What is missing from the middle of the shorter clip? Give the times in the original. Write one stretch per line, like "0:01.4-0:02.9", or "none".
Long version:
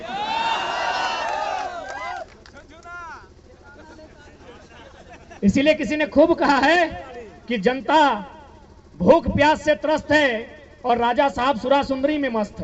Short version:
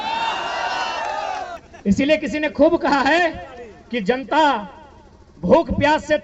0:01.9-0:05.2